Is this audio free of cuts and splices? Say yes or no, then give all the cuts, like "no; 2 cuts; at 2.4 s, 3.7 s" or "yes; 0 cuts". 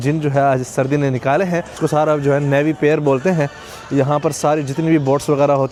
yes; 0 cuts